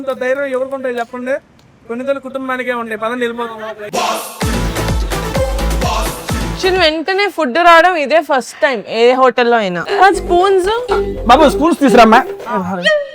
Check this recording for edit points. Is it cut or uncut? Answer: cut